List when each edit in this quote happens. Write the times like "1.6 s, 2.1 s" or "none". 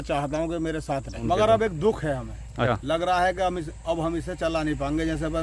1.2 s, 2.7 s